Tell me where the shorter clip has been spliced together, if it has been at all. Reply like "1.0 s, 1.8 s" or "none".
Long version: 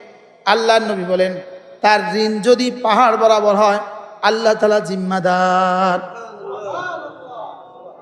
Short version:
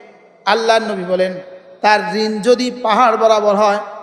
none